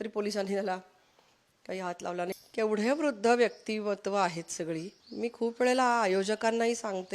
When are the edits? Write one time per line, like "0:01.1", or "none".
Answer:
0:02.3
0:05.0